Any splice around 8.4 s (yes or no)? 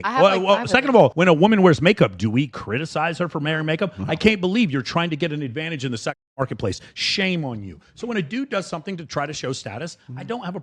no